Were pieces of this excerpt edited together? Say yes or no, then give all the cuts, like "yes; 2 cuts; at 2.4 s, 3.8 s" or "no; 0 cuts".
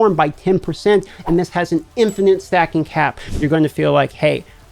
yes; 1 cut; at 3.2 s